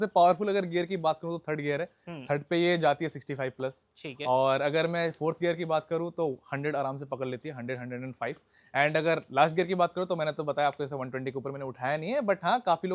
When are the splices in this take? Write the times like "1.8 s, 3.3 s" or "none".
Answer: none